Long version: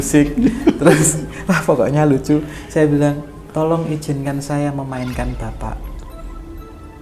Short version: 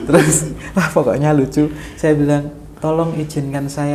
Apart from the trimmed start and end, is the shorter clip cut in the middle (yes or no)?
no